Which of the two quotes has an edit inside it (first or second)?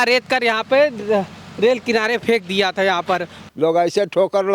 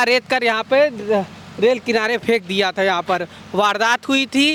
first